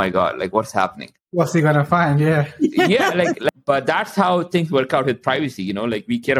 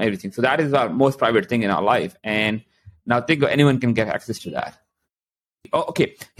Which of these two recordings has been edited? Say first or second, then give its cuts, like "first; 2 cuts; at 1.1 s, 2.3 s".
first; 1 cut; at 3.6 s